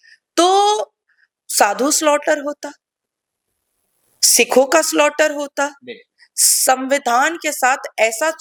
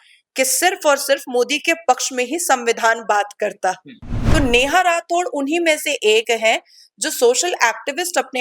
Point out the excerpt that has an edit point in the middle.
second; 1 cut; at 4.1 s

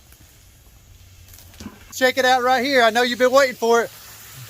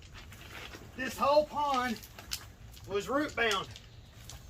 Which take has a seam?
first; 1 cut; at 1.9 s

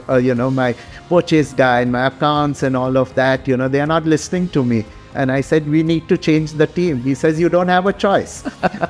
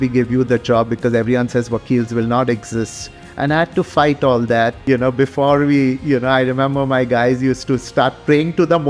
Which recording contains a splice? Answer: second; 1 cut; at 4.8 s

